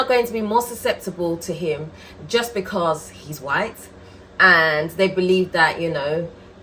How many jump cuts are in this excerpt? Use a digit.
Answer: 0